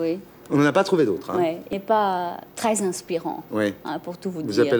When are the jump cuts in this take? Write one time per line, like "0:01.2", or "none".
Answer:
0:01.7